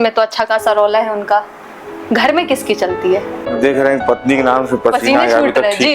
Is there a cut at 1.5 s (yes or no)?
no